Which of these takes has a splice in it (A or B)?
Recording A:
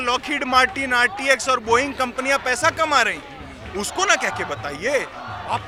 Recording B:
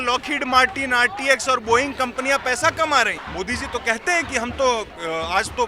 B